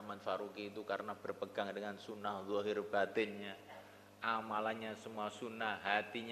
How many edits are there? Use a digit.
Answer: 0